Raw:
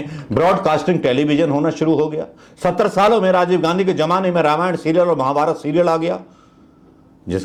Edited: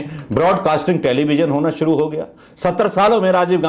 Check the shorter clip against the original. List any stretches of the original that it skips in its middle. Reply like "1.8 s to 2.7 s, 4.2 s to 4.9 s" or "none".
none

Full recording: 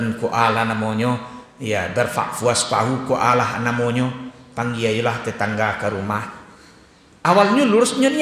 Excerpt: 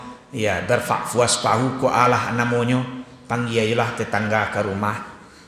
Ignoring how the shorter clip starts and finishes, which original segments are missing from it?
none

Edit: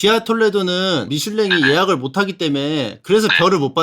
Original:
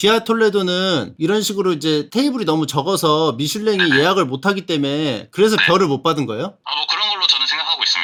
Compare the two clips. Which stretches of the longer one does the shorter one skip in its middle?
1.1 s to 3.4 s

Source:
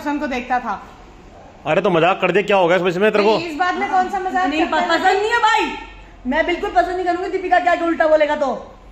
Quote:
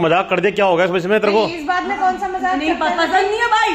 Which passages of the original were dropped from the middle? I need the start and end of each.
none

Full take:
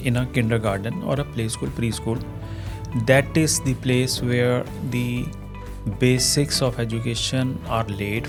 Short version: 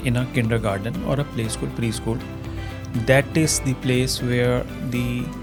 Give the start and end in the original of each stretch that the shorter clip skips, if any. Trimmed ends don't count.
none

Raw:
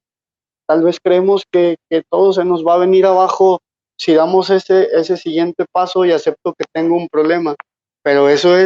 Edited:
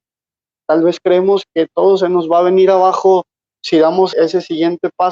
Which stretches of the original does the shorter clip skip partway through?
1.5 s to 1.8 s, 4.5 s to 4.9 s

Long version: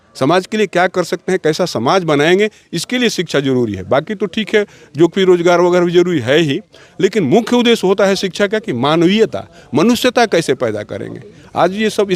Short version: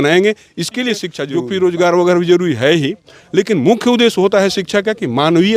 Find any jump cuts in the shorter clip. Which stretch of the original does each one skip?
3.3 s to 4.8 s

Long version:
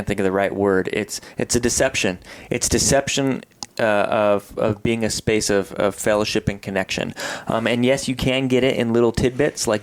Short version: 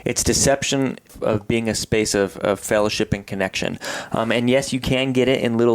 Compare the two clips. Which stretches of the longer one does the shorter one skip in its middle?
3.6 s to 4.5 s

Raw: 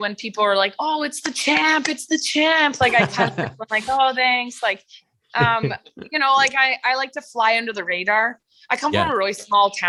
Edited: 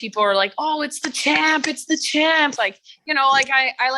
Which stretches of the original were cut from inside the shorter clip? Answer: 2.8 s to 5.6 s

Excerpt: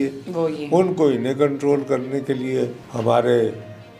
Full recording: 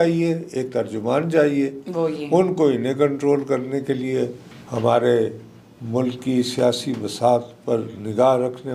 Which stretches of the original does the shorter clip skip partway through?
4.4 s to 4.6 s

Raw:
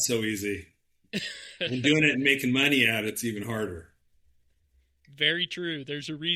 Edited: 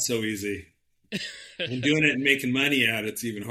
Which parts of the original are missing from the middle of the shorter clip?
none

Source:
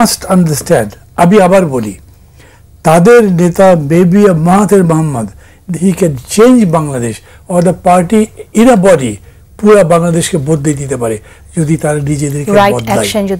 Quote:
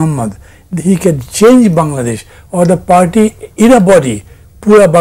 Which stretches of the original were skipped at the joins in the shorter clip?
none

